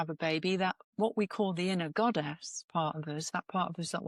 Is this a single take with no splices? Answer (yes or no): yes